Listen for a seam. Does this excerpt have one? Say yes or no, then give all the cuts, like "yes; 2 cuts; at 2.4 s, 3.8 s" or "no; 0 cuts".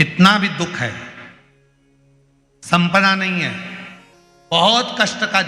no; 0 cuts